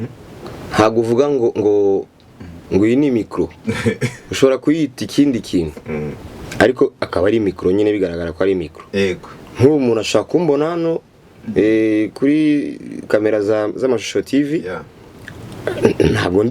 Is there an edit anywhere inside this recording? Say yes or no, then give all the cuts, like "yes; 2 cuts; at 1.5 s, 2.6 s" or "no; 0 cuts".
no; 0 cuts